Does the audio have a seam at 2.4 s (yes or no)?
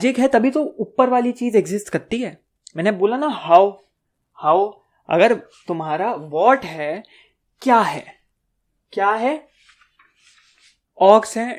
no